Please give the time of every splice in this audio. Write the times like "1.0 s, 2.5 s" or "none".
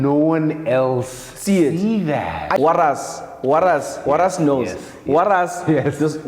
2.6 s